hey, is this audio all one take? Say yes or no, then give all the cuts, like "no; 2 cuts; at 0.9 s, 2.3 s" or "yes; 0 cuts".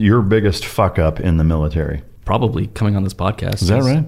no; 1 cut; at 2.1 s